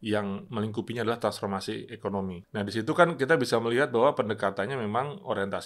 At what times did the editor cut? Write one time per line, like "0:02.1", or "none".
0:02.4

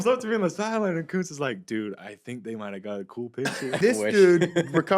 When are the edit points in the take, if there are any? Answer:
0:03.8

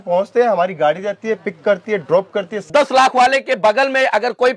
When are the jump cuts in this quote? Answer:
0:02.7

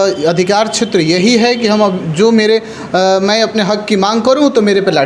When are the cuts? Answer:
none

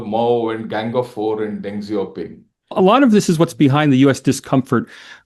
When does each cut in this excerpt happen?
0:02.7

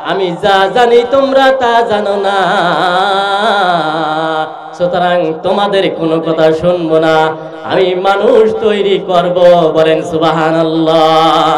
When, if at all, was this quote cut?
none

